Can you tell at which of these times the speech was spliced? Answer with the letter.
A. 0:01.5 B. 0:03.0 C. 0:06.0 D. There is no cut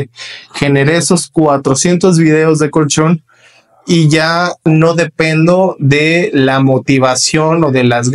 D